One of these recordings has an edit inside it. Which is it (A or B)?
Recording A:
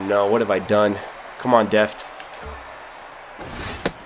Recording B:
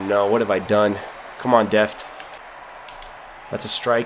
B